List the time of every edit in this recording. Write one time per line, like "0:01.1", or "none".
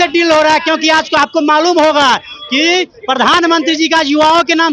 none